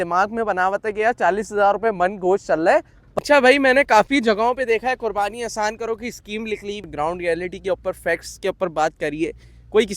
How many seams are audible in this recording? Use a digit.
2